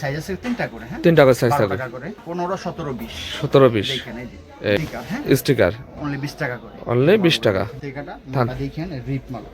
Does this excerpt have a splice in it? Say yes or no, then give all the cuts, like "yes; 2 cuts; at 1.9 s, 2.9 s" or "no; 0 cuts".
yes; 3 cuts; at 2.1 s, 4.8 s, 7.8 s